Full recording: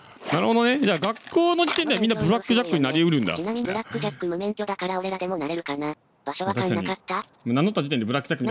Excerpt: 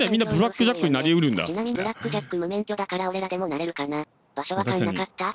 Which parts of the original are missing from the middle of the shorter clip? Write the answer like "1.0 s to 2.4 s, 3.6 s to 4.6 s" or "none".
none

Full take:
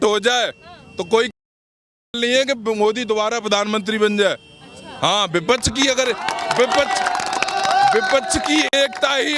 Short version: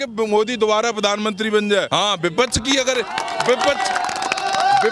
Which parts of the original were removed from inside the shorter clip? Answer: 4.4 s to 5.0 s

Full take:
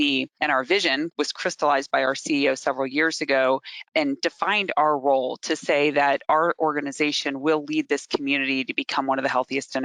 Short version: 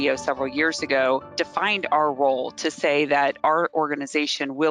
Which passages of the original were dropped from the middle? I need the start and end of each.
3.7 s to 4.2 s

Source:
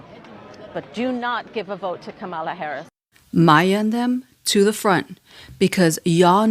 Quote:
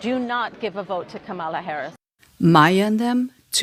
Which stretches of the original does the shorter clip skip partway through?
none

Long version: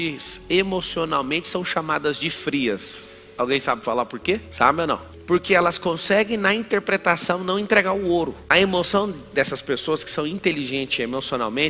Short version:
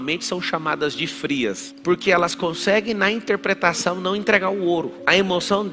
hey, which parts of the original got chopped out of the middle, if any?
2.9 s to 5.1 s

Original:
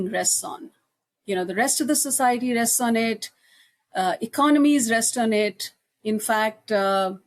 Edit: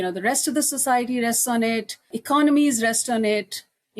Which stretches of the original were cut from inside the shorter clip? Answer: 3.5 s to 4.2 s

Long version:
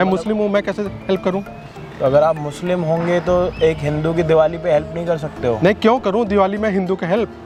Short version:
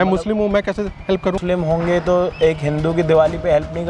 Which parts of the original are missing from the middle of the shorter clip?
1.4 s to 2.6 s

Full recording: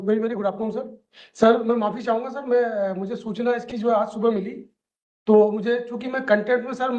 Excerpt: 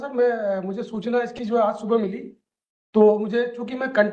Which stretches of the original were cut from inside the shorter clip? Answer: none

